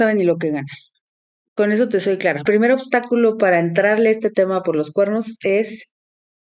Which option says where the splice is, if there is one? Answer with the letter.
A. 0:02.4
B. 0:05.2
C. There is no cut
A